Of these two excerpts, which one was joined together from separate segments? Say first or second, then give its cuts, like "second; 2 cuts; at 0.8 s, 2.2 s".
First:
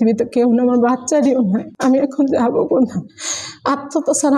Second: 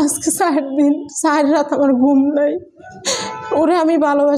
first; 1 cut; at 1.7 s